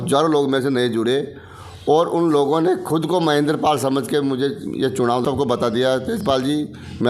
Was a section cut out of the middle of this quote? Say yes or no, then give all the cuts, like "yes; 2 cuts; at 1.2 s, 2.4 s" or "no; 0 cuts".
yes; 1 cut; at 5.2 s